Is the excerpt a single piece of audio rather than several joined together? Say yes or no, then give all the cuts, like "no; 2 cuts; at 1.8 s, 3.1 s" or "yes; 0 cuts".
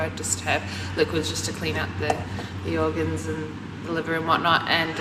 no; 1 cut; at 1.1 s